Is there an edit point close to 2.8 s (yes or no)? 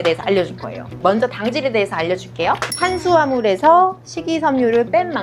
yes